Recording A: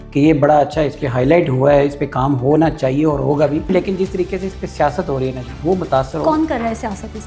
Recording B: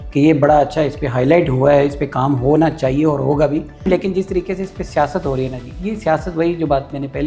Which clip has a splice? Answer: A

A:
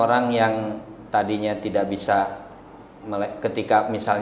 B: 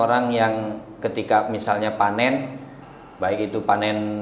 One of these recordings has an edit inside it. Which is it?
B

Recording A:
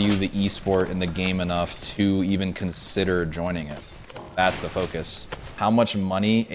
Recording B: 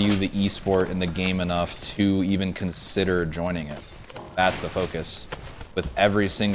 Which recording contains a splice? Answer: A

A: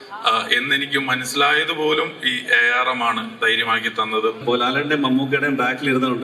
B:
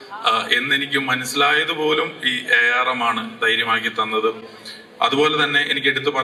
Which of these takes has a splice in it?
A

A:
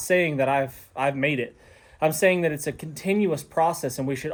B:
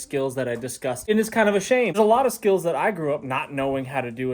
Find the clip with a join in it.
B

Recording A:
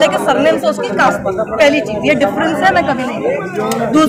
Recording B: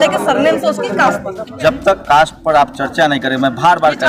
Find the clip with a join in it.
B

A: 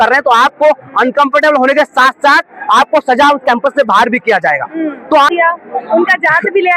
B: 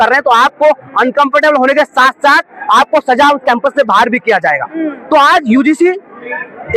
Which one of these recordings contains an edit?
A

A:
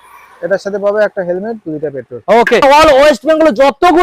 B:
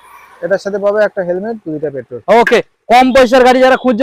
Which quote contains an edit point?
A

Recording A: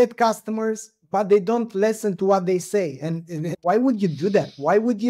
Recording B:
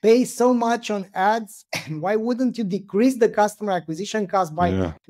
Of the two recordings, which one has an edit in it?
A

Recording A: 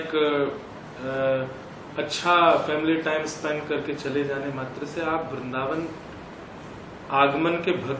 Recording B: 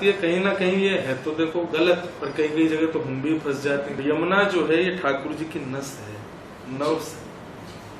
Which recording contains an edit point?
B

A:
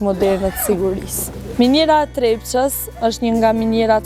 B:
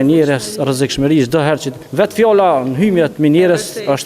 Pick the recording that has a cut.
B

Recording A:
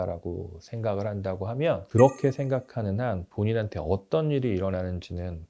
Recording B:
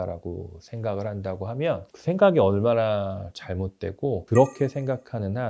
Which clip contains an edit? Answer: A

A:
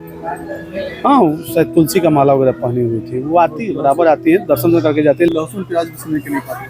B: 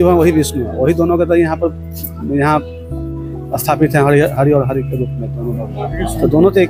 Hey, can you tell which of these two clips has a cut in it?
A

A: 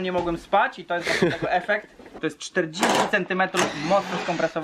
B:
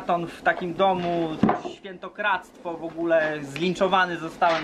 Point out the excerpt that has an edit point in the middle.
A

